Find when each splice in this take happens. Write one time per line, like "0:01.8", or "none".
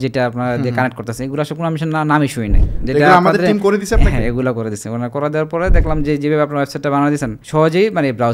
0:07.4